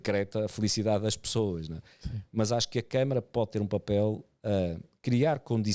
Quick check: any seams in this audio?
no; 0 cuts

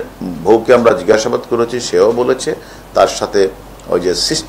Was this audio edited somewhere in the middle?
no; 0 cuts

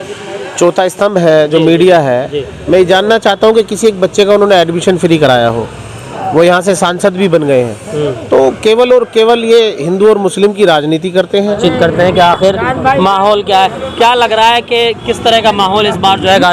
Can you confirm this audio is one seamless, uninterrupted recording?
yes; 0 cuts

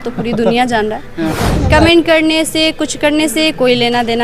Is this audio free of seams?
no; 1 cut; at 1.4 s

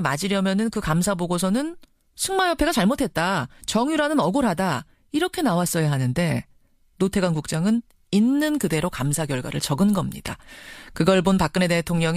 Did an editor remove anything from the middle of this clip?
no; 0 cuts

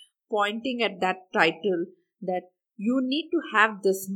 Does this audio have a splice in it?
no; 0 cuts

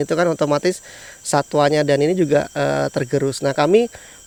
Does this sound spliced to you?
no; 0 cuts

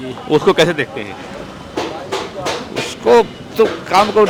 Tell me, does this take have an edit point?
no; 0 cuts

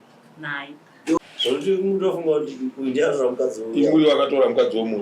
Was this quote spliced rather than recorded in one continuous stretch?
yes; 1 cut; at 1.2 s

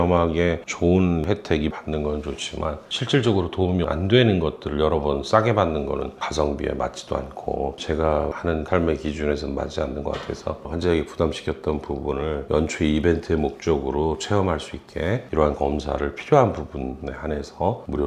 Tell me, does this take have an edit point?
yes; 2 cuts; at 6.2 s, 10.6 s

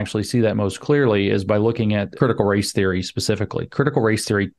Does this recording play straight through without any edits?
no; 1 cut; at 2.1 s

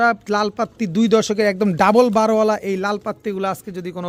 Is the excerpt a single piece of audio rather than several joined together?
yes; 0 cuts

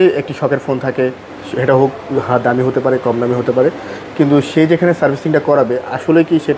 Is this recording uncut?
yes; 0 cuts

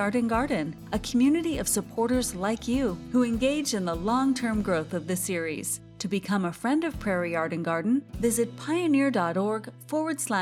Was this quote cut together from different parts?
no; 0 cuts

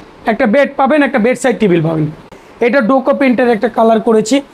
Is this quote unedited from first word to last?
no; 1 cut; at 2.3 s

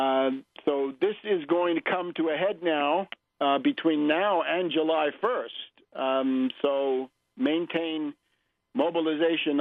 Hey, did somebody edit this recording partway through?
no; 0 cuts

